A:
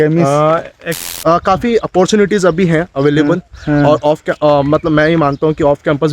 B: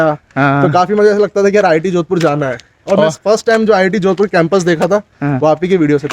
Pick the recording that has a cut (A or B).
A